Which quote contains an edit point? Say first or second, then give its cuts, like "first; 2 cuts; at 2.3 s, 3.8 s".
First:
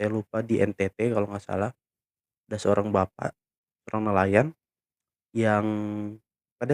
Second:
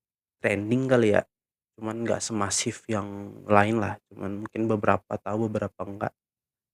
first; 1 cut; at 3.5 s